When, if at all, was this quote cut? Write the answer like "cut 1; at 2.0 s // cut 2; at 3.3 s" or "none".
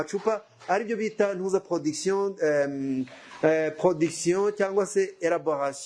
none